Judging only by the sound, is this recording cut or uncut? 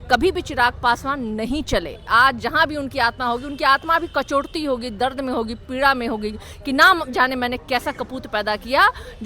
cut